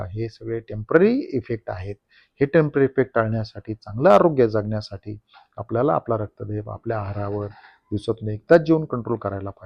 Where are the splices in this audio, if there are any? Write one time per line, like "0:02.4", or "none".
none